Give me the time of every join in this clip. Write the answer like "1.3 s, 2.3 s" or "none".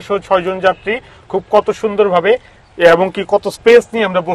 none